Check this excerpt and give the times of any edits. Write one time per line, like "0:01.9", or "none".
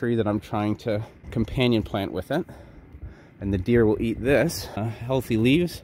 0:01.2
0:04.9